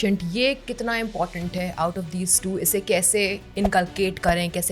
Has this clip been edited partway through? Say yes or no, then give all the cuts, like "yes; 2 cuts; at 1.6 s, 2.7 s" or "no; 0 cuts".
no; 0 cuts